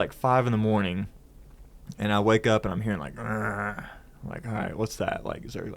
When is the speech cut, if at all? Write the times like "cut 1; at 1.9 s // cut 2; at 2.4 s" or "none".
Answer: none